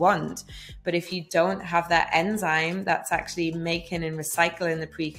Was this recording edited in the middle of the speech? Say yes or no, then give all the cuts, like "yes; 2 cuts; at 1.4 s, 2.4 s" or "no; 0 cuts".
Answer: no; 0 cuts